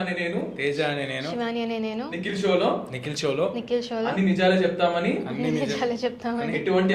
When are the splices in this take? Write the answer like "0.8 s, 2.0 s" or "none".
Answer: none